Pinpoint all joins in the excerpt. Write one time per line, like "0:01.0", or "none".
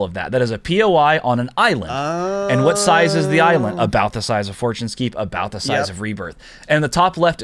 none